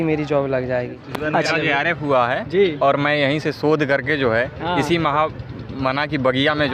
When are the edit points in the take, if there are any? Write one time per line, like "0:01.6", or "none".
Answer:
0:01.0